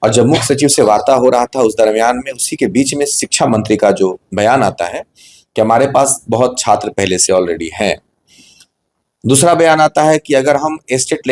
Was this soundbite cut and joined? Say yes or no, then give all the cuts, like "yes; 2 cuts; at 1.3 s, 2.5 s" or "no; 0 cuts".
no; 0 cuts